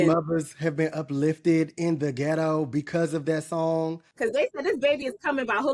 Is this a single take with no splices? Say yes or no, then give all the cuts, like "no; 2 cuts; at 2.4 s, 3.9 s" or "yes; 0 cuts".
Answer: no; 1 cut; at 4.1 s